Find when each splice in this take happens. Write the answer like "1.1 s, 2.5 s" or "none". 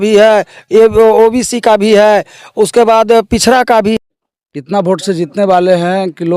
4.0 s